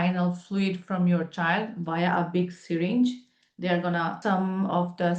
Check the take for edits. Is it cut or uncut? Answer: cut